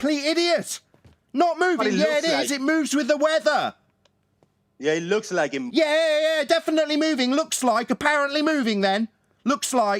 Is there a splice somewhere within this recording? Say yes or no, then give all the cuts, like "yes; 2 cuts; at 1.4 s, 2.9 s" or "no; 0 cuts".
no; 0 cuts